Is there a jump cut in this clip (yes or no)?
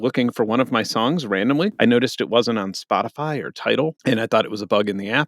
yes